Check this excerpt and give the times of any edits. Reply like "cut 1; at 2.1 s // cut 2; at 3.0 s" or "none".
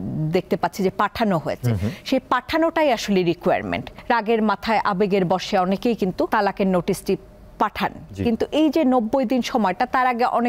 cut 1; at 3.9 s // cut 2; at 6.3 s